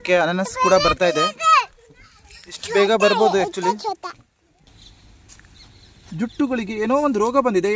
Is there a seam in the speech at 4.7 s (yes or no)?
yes